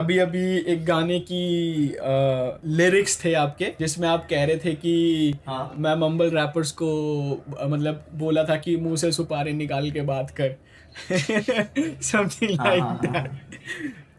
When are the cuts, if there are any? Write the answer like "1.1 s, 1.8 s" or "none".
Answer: 2.6 s, 3.8 s